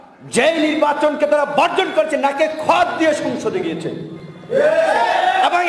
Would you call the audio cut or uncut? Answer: uncut